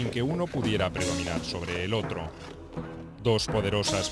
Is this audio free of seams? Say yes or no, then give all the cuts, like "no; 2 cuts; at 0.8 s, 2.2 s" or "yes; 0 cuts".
no; 1 cut; at 1.0 s